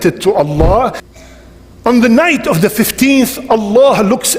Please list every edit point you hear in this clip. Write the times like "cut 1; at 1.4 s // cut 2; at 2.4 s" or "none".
cut 1; at 1.0 s